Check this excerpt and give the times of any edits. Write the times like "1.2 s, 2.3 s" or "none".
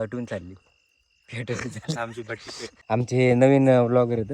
3.1 s